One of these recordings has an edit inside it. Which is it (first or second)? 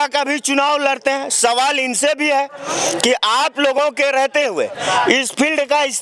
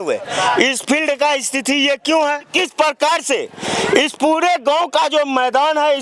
second